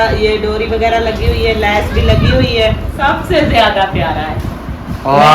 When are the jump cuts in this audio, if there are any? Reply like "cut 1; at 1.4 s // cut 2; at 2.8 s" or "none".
cut 1; at 2.9 s